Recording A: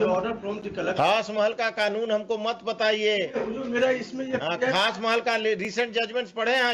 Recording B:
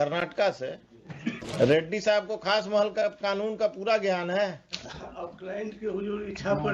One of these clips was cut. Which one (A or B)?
B